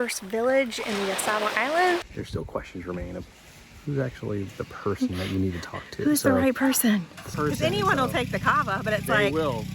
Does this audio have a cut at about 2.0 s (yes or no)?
yes